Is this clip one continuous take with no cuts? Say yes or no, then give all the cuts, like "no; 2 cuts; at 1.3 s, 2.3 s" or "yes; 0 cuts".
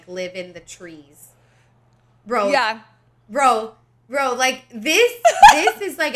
yes; 0 cuts